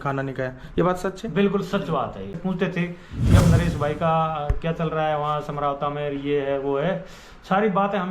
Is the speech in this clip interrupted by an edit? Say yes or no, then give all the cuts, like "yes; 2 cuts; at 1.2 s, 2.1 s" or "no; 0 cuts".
yes; 1 cut; at 2.3 s